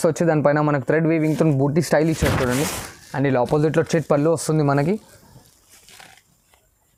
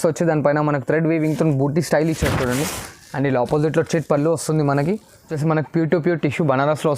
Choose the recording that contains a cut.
second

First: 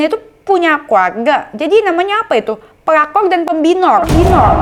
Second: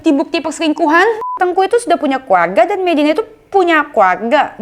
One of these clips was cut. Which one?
second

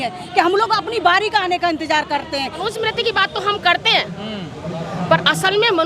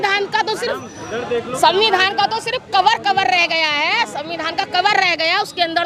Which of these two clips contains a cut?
first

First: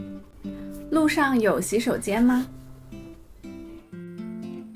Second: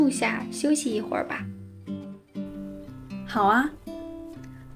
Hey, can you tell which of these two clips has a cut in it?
first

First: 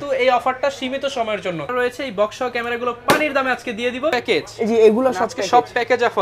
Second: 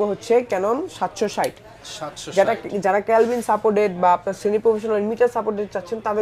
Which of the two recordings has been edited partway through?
first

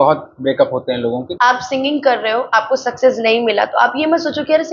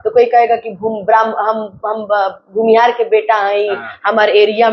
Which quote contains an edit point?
first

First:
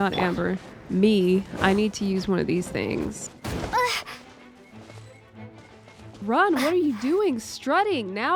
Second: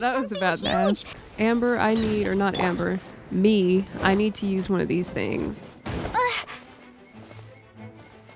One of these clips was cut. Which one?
second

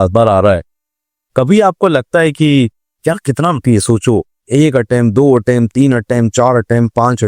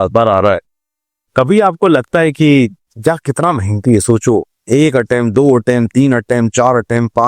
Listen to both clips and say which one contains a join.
first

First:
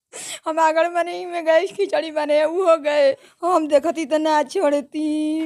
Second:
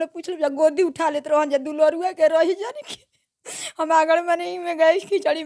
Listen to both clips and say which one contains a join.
first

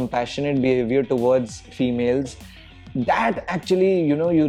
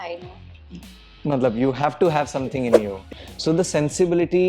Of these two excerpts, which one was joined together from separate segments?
second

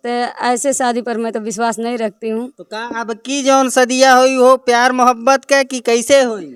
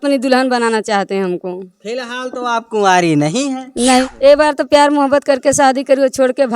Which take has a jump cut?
second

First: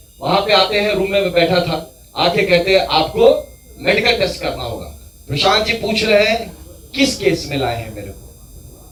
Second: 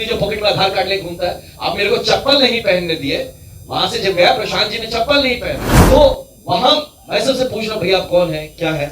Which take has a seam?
second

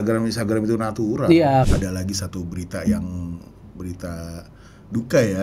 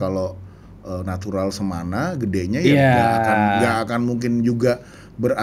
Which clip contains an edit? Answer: first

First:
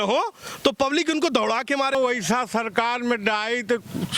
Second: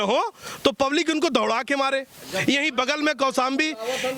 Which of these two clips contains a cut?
first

